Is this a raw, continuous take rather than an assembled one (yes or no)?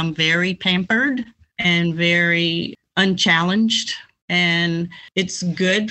no